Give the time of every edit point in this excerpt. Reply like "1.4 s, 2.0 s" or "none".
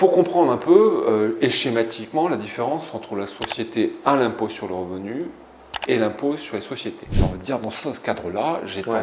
7.0 s